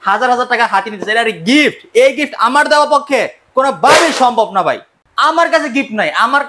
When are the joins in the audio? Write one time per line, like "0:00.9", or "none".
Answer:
0:04.9